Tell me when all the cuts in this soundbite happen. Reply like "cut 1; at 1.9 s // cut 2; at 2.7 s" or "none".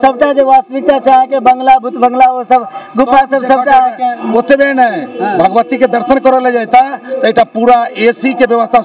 none